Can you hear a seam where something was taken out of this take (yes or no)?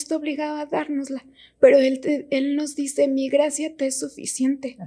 no